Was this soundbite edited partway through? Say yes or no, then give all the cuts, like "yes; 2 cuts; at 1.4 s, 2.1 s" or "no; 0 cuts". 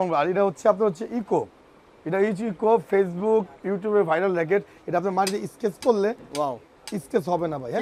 no; 0 cuts